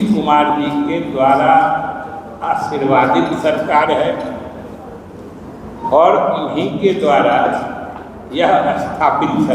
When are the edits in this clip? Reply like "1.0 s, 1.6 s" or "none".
none